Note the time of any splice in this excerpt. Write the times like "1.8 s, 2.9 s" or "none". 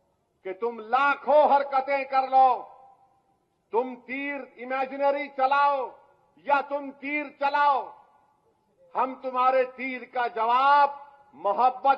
none